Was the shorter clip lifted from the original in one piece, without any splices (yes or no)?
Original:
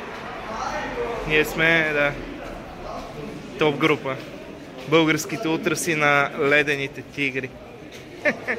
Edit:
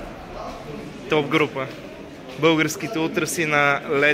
yes